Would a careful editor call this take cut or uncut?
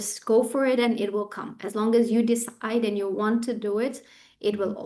uncut